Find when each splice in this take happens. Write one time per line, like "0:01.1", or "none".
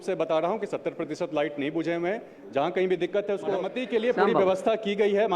0:03.7